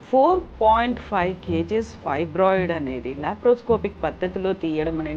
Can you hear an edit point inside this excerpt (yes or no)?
no